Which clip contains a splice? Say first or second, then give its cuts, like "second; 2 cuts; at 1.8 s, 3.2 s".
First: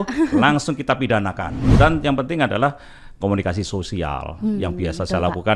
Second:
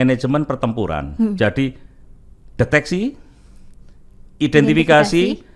first; 1 cut; at 1.5 s